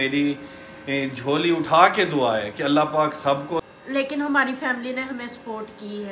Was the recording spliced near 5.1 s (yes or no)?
no